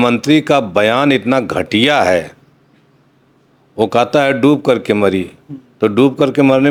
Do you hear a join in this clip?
no; 0 cuts

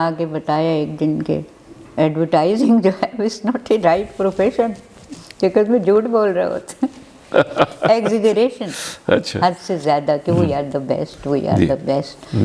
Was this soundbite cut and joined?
no; 0 cuts

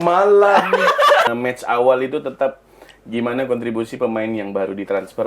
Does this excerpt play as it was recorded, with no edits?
no; 1 cut; at 1.3 s

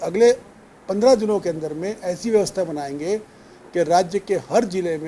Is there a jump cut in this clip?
no; 0 cuts

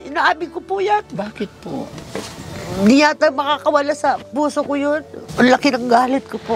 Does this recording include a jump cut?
yes; 1 cut; at 5.2 s

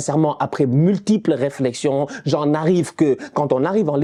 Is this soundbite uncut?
yes; 0 cuts

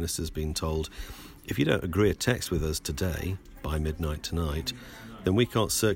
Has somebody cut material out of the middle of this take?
no; 0 cuts

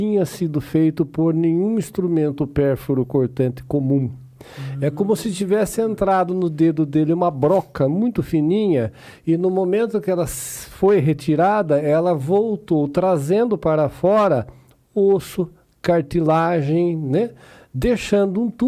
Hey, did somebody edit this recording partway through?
no; 0 cuts

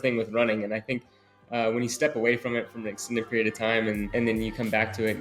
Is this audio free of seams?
no; 1 cut; at 4.1 s

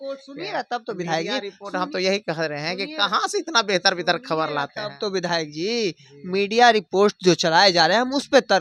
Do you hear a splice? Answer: no; 0 cuts

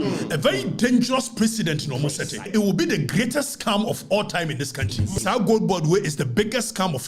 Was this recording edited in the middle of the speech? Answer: yes; 2 cuts; at 2.4 s, 5.2 s

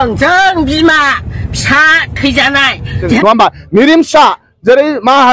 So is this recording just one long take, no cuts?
no; 1 cut; at 3.2 s

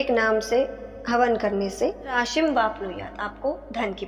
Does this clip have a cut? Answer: yes; 1 cut; at 2.2 s

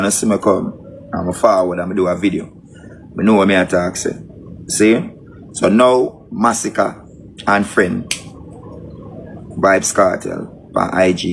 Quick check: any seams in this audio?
no; 0 cuts

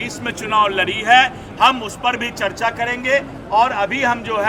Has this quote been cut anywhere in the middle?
no; 0 cuts

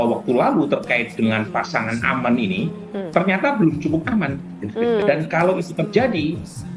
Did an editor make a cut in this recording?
yes; 1 cut; at 5.0 s

